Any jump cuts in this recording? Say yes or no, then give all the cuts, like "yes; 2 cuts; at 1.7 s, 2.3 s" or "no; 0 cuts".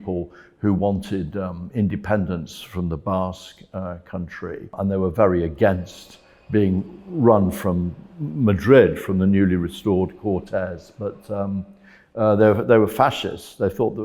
yes; 1 cut; at 4.7 s